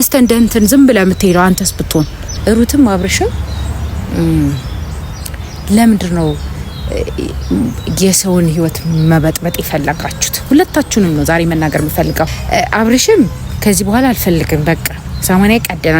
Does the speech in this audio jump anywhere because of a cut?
yes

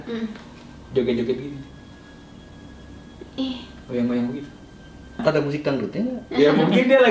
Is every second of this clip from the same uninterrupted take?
no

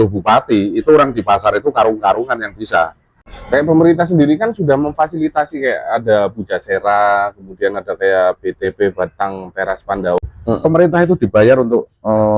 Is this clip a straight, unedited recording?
no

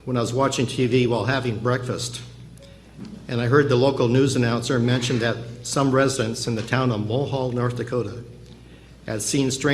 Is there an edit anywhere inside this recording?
yes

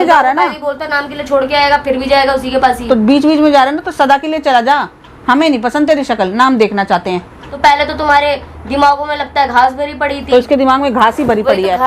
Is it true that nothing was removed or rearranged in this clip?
no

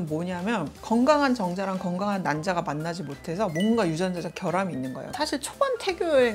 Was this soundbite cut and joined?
yes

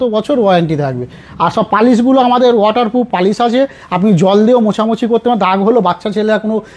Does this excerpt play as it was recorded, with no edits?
yes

